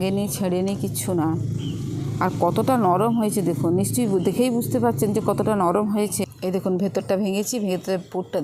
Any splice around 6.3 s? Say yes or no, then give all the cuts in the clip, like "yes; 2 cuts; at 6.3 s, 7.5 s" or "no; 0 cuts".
yes; 1 cut; at 6.3 s